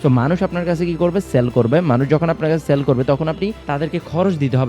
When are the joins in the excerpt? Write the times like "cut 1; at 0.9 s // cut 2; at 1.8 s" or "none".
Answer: cut 1; at 3.6 s